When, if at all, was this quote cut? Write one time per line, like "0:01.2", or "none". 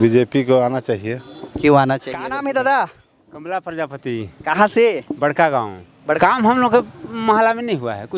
0:02.3
0:06.2